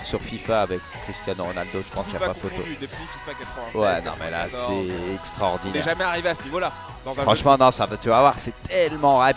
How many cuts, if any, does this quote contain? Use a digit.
1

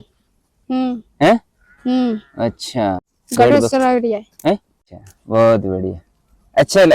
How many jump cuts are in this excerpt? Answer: 2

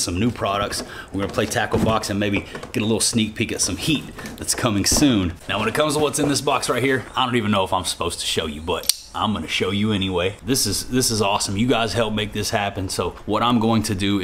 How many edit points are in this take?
3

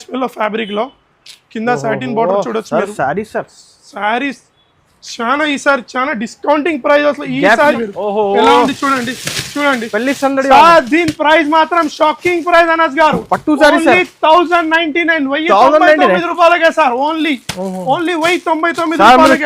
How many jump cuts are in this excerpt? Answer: 1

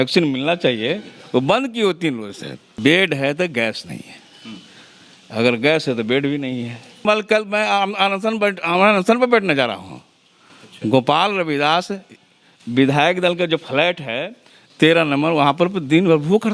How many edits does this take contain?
2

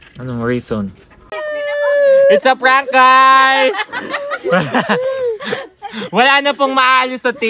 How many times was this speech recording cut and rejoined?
1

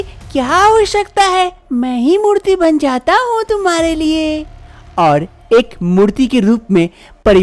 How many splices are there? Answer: 1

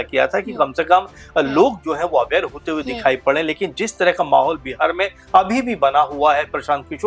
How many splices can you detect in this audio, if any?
0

